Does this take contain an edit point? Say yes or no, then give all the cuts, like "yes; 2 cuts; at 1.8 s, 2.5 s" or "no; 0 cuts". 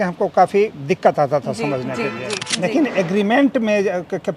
yes; 1 cut; at 2.4 s